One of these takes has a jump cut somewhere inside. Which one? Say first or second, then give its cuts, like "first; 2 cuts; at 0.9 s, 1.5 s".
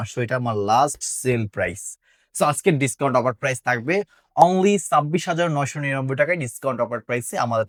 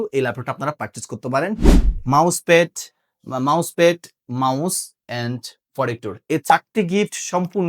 second; 1 cut; at 1.7 s